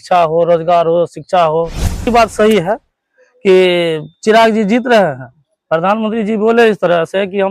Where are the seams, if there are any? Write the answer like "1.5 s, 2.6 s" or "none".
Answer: 2.1 s